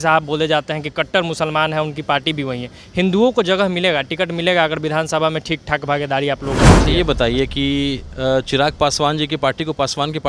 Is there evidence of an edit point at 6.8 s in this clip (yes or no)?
yes